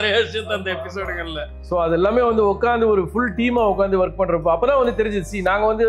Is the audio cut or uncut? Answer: uncut